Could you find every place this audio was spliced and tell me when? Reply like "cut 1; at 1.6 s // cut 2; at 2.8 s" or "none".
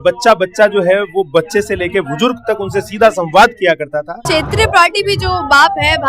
cut 1; at 4.2 s